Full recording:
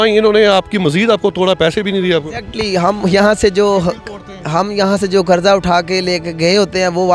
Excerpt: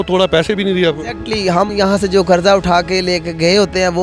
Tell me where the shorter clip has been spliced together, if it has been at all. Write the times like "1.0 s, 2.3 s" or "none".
1.7 s